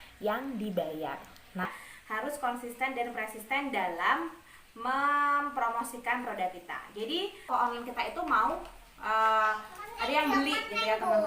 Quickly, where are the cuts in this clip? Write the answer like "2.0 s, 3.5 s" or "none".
1.7 s, 7.5 s